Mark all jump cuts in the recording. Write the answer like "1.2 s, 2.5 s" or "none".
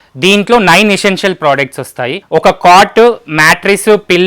2.2 s